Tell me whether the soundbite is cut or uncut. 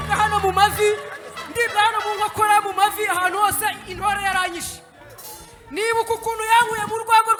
uncut